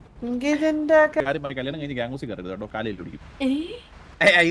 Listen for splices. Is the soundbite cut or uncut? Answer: cut